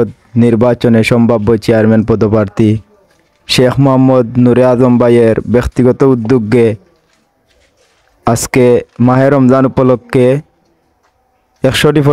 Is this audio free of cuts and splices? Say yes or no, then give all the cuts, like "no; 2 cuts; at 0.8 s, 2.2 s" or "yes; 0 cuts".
yes; 0 cuts